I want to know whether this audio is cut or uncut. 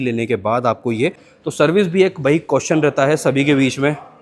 cut